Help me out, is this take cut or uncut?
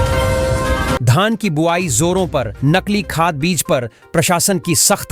cut